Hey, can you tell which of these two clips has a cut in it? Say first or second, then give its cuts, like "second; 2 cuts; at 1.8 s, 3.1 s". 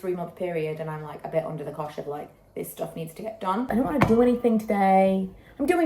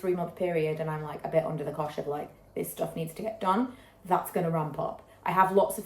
first; 1 cut; at 3.7 s